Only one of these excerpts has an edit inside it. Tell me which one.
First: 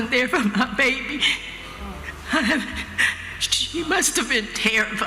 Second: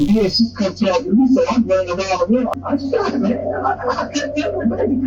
second; 1 cut; at 2.5 s

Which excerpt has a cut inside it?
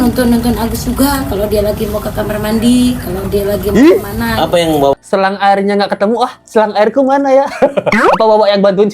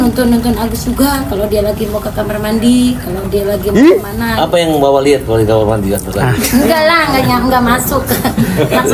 first; 1 cut; at 4.9 s

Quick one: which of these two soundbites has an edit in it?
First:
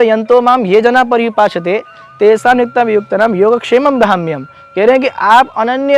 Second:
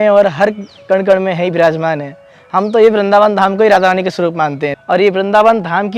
second; 1 cut; at 4.7 s

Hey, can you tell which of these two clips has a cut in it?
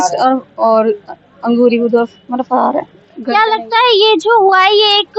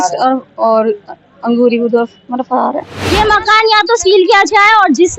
second; 1 cut; at 3.1 s

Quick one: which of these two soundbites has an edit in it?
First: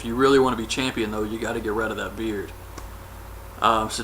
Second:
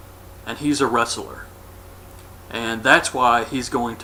first; 1 cut; at 1.7 s

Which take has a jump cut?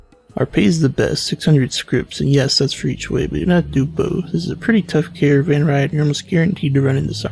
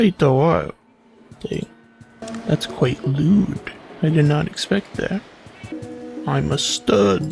second; 2 cuts; at 2.2 s, 5.7 s

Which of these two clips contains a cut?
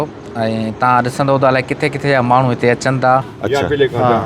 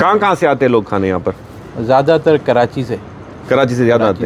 first; 1 cut; at 3.3 s

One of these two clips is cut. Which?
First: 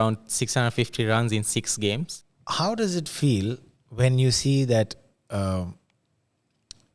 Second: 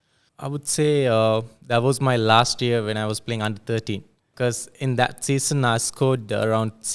first; 1 cut; at 2.1 s

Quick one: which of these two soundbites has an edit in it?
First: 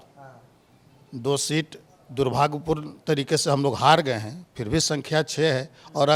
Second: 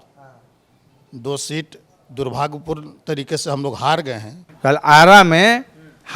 second; 1 cut; at 4.4 s

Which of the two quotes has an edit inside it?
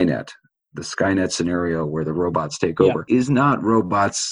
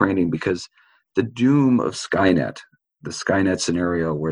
first; 1 cut; at 3.1 s

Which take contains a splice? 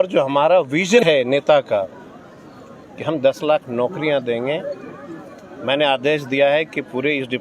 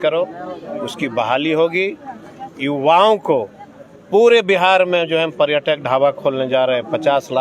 first; 1 cut; at 1.0 s

